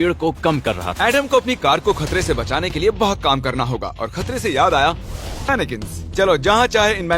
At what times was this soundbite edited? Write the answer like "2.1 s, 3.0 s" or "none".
5.5 s